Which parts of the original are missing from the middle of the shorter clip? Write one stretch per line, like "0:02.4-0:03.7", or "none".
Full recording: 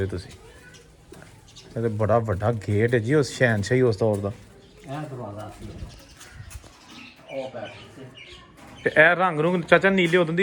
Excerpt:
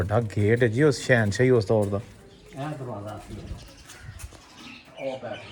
none